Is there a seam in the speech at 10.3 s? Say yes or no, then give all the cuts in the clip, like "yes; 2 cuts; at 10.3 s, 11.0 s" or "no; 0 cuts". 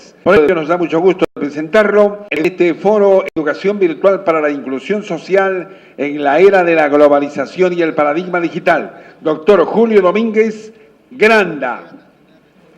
yes; 1 cut; at 10.3 s